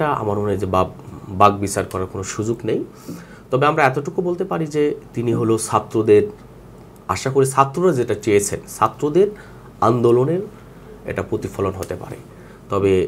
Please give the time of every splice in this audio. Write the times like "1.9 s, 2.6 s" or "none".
none